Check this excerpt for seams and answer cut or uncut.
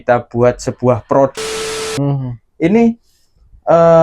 cut